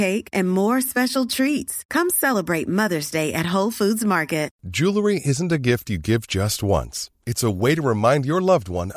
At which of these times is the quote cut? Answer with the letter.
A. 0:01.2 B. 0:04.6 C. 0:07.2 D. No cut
B